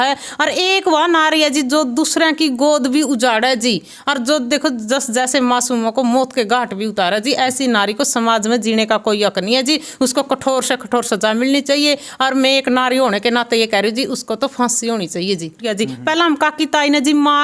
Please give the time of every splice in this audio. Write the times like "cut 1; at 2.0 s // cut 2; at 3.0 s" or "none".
cut 1; at 15.7 s